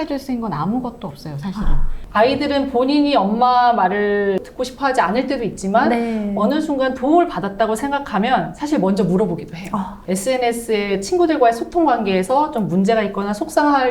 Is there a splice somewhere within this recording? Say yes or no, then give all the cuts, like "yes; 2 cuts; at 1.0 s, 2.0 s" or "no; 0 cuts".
yes; 2 cuts; at 2.0 s, 4.5 s